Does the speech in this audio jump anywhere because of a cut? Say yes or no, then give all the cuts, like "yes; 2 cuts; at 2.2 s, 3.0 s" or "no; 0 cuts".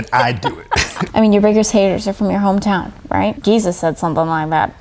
yes; 2 cuts; at 1.1 s, 3.4 s